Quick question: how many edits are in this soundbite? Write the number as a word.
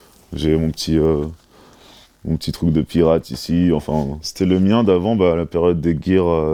zero